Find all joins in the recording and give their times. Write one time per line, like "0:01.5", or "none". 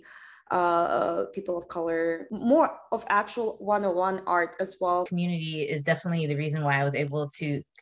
0:02.3
0:05.1